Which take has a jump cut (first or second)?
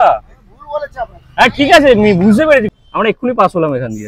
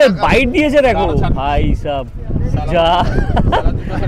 first